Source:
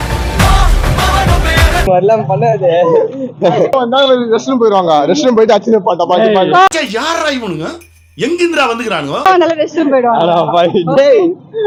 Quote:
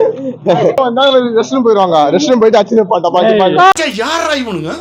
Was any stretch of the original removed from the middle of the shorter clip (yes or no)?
no